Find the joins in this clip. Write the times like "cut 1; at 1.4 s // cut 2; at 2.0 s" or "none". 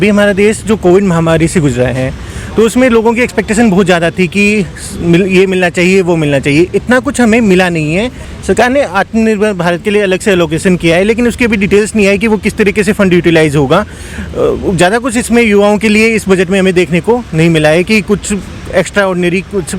cut 1; at 8.2 s